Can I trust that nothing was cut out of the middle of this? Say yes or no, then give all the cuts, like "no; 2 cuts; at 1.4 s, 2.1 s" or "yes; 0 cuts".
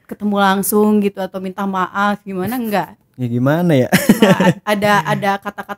no; 1 cut; at 3.0 s